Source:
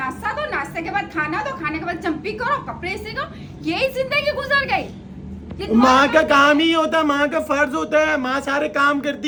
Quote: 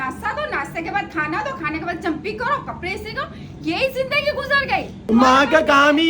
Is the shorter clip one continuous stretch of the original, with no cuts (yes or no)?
no